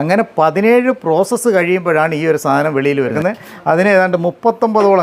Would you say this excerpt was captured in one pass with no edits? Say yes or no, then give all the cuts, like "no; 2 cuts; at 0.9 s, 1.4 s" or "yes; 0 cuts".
no; 1 cut; at 3.2 s